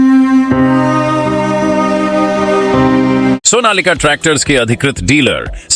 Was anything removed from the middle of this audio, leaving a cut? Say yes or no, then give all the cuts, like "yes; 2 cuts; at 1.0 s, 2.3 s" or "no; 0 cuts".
yes; 1 cut; at 3.4 s